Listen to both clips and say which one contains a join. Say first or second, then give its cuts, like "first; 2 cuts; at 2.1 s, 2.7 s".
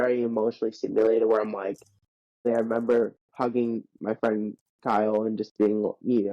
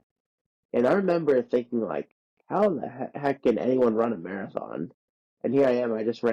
first; 1 cut; at 2.5 s